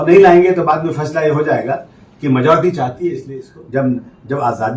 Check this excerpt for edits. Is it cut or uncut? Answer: cut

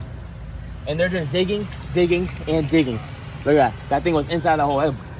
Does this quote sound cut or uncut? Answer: uncut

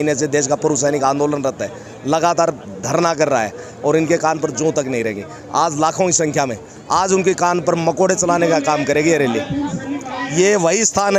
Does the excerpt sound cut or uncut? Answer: uncut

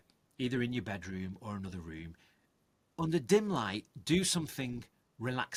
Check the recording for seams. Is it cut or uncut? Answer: uncut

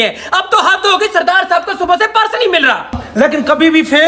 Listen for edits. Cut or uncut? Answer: cut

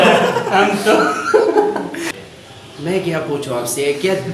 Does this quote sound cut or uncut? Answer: cut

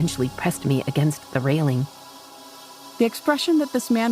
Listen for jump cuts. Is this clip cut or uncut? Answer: cut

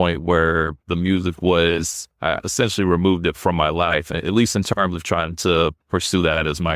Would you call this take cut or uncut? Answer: cut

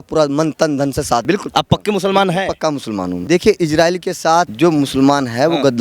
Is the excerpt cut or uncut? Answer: cut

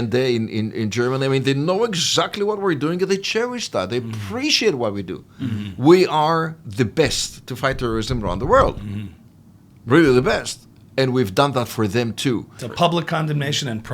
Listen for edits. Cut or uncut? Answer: cut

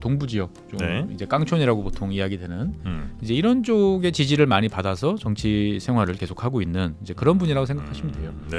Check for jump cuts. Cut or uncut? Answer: uncut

